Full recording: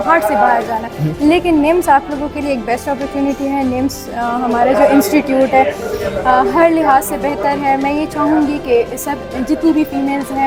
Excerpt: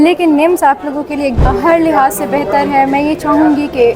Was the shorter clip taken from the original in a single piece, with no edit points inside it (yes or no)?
no